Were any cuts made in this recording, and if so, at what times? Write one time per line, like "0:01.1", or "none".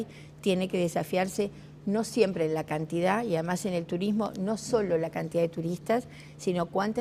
none